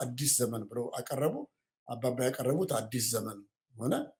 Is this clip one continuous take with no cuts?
yes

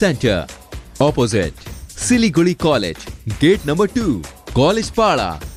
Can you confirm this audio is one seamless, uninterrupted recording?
yes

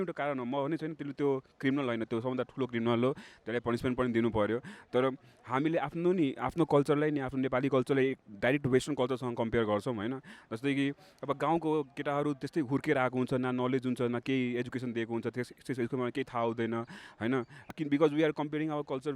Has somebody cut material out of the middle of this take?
yes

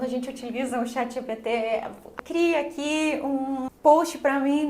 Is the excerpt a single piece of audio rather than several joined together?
no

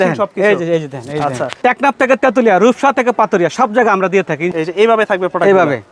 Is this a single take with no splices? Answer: no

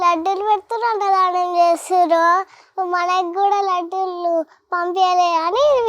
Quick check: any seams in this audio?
no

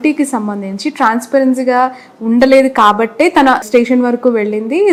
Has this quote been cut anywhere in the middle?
no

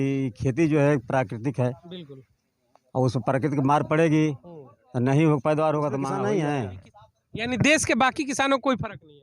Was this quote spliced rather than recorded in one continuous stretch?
yes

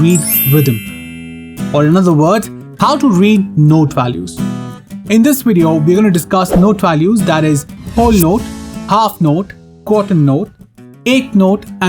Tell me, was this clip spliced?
no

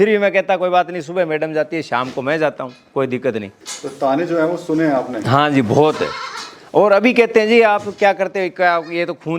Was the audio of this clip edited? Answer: no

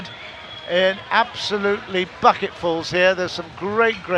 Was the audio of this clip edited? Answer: no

